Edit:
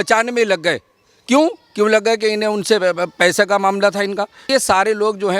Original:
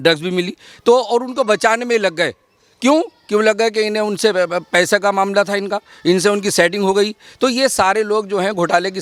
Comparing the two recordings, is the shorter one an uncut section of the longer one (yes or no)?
no